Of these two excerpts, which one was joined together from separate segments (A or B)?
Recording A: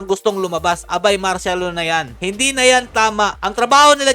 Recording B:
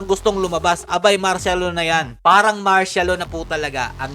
B